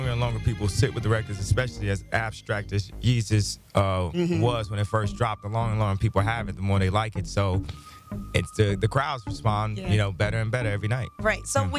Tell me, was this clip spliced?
yes; 1 cut; at 5.2 s

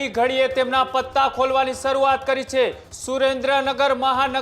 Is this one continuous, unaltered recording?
no; 1 cut; at 2.9 s

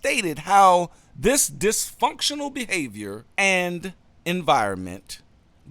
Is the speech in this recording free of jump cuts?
no; 1 cut; at 3.2 s

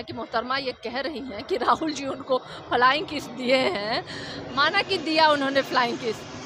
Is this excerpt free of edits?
yes; 0 cuts

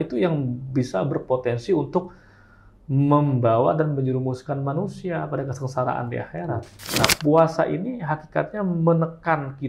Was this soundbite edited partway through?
yes; 1 cut; at 7.0 s

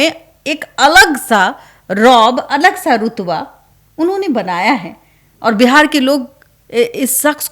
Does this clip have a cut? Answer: no; 0 cuts

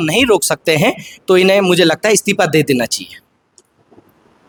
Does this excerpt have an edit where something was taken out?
no; 0 cuts

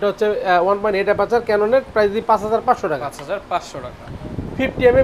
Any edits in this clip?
no; 0 cuts

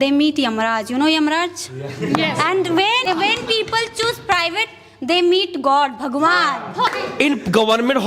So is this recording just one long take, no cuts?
no; 2 cuts; at 3.1 s, 7.0 s

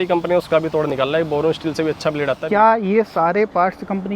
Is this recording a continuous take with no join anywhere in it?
no; 1 cut; at 2.4 s

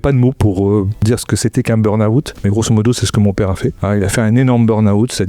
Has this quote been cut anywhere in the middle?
yes; 3 cuts; at 1.0 s, 2.3 s, 3.8 s

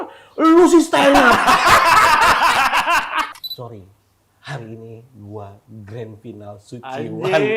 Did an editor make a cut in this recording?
yes; 1 cut; at 3.3 s

